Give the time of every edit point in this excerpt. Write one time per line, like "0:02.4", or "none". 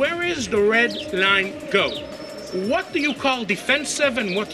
none